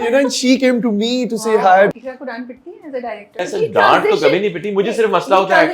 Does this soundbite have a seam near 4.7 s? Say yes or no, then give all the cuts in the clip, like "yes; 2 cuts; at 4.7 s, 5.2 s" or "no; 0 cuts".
no; 2 cuts; at 1.9 s, 3.4 s